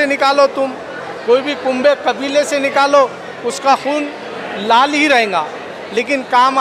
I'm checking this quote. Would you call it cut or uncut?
uncut